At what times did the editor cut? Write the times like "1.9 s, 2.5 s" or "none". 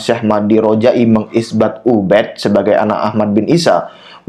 none

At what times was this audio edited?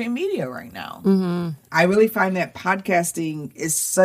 1.6 s

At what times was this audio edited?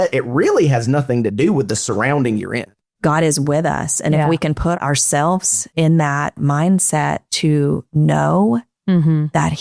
2.8 s, 5.6 s, 7.5 s

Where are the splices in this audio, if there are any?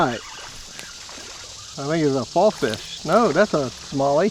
1.7 s

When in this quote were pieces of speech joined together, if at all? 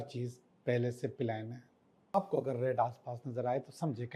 2.2 s

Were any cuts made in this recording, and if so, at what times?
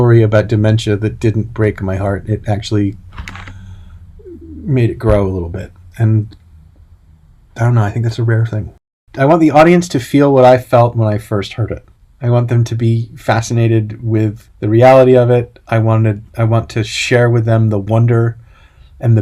9.0 s, 14.5 s

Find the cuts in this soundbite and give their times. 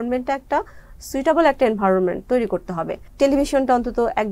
3.1 s

